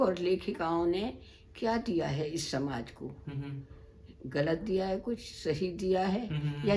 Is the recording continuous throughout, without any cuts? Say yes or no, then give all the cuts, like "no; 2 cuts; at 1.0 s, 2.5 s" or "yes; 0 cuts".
yes; 0 cuts